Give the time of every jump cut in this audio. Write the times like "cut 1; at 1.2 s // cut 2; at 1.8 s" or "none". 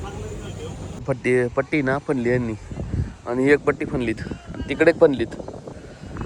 cut 1; at 0.9 s

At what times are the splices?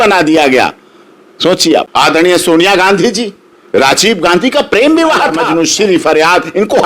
cut 1; at 1.9 s // cut 2; at 5.5 s

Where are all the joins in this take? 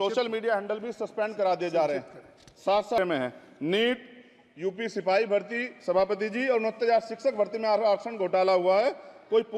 cut 1; at 3.0 s

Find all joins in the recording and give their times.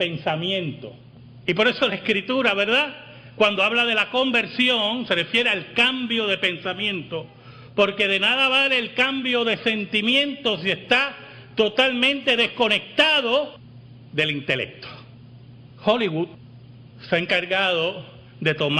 cut 1; at 15.9 s

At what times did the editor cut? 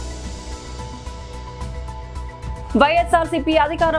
cut 1; at 1.4 s // cut 2; at 2.5 s

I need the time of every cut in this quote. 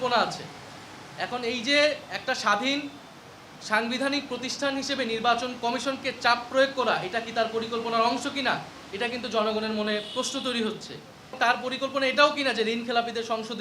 cut 1; at 11.3 s

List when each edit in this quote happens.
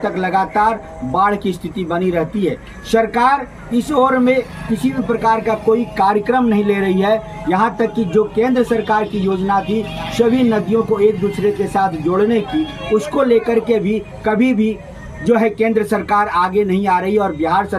none

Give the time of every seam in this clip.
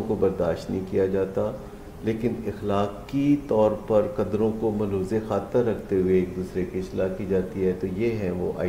none

